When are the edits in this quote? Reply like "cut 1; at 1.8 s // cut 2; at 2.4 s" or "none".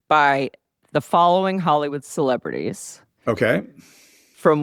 none